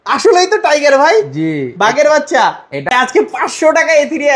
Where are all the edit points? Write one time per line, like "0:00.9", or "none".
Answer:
0:02.9